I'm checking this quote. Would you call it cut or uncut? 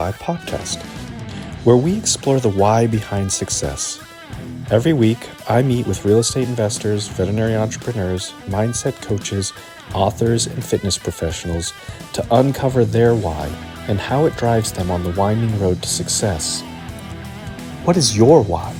uncut